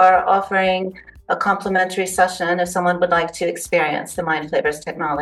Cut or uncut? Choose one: uncut